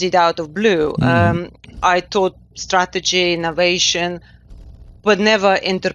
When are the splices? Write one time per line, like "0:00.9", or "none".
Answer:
none

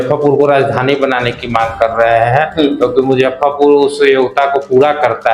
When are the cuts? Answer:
none

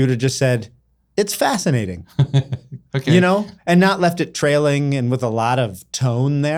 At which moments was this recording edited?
none

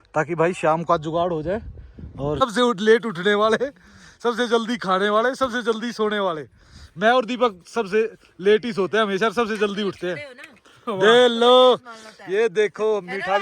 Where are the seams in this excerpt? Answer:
0:02.4

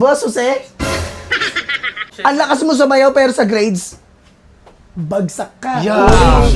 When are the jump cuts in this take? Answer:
0:02.1

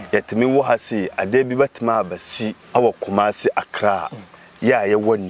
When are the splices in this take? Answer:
0:02.6

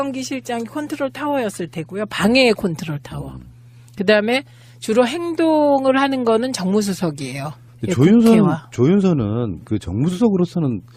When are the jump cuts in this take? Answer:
0:09.9

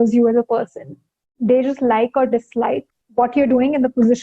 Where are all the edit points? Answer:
0:03.0

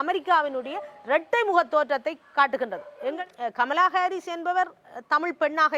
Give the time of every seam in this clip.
0:03.1

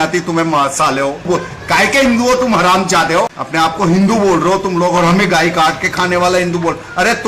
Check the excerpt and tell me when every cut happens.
0:01.2
0:03.4

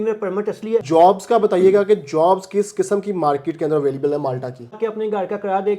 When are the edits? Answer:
0:00.8
0:04.8

